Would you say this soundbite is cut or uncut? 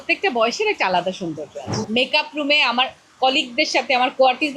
cut